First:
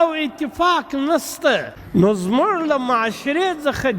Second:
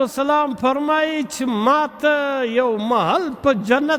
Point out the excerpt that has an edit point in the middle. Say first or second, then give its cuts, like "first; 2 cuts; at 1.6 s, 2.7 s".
first; 1 cut; at 1.8 s